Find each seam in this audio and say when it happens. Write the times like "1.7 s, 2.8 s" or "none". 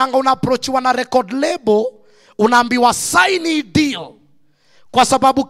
none